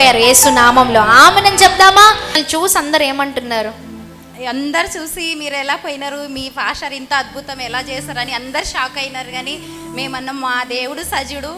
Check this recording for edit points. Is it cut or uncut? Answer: cut